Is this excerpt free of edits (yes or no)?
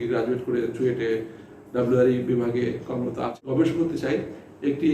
no